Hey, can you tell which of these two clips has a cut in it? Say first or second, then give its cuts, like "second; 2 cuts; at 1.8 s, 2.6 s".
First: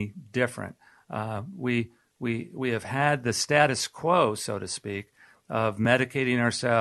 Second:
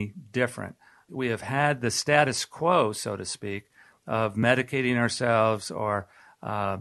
second; 1 cut; at 1.0 s